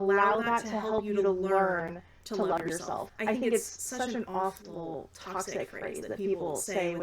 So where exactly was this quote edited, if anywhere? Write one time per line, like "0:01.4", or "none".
0:03.1